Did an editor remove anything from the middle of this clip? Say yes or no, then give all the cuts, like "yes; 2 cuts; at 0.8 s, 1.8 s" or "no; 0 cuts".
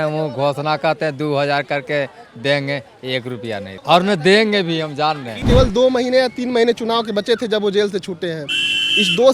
yes; 2 cuts; at 3.7 s, 5.4 s